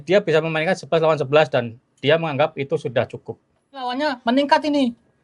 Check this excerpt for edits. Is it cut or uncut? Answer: cut